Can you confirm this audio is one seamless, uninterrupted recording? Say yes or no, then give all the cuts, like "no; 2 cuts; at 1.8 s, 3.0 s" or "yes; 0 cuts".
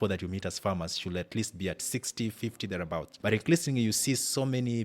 no; 1 cut; at 3.1 s